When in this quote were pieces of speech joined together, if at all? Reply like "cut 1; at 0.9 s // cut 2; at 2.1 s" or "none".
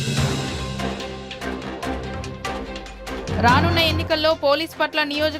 none